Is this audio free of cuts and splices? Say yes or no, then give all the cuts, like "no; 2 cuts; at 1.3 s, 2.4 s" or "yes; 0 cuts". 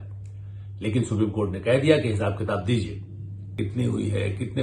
no; 1 cut; at 3.5 s